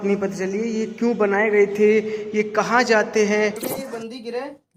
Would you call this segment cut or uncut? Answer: cut